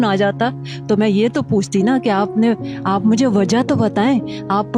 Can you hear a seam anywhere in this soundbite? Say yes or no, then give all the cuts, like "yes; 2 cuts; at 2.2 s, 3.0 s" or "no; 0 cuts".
no; 0 cuts